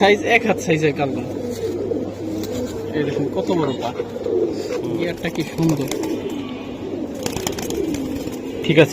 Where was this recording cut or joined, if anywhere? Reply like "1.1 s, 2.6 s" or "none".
5.2 s